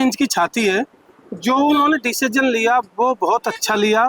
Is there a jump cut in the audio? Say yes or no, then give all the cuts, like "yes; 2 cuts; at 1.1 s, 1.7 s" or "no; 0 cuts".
no; 0 cuts